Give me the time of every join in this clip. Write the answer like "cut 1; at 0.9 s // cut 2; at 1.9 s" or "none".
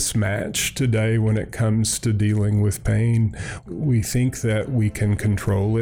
cut 1; at 3.6 s